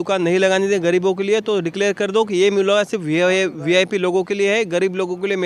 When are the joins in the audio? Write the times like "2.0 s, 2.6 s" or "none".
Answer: none